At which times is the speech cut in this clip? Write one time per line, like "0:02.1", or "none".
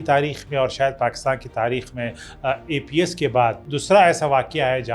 0:03.7